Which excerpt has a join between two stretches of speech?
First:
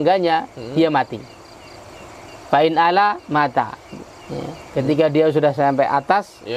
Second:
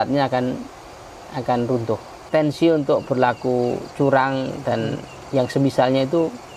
second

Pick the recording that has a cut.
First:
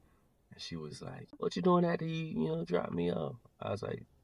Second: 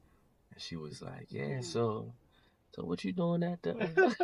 first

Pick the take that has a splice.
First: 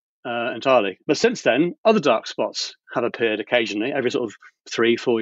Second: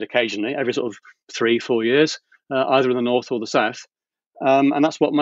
first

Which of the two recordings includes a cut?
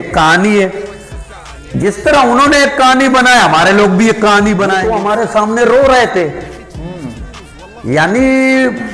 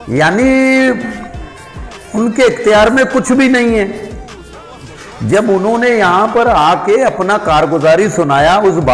first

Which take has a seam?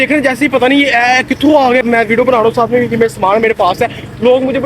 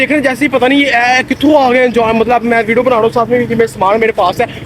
first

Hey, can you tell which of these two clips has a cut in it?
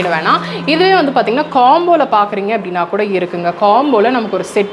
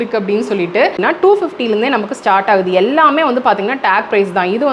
second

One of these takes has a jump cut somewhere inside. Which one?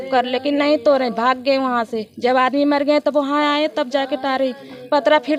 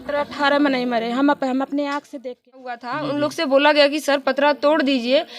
second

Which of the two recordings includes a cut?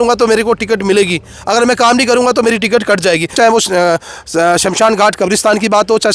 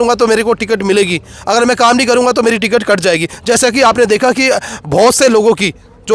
first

